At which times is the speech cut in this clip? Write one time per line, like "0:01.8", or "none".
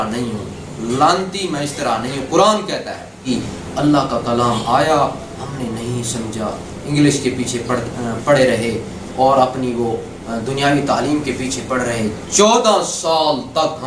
0:03.2